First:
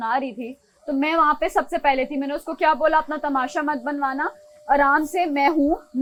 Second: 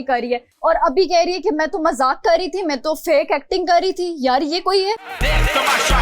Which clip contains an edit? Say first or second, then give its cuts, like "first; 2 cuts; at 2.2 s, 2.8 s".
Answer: second; 1 cut; at 5.1 s